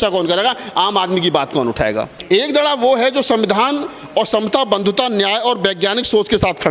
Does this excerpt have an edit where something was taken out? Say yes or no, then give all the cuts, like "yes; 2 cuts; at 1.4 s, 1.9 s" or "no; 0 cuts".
yes; 1 cut; at 2.2 s